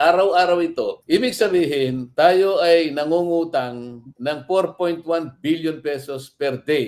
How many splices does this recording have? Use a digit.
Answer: 0